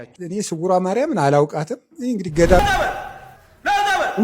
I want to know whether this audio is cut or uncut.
cut